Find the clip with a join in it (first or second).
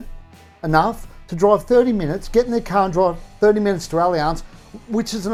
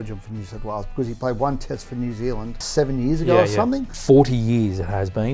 second